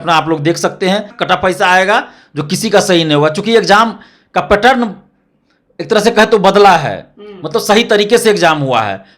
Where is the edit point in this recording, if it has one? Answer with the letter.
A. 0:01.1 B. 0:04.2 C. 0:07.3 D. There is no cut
A